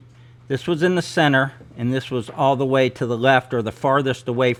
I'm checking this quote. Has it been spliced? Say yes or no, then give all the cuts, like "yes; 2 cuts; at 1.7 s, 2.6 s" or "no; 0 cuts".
no; 0 cuts